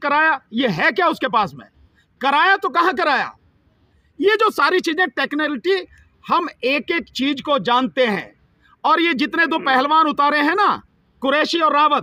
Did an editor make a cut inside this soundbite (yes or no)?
no